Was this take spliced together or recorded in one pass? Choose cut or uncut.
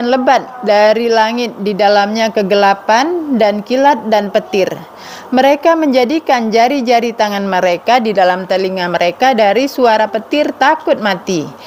uncut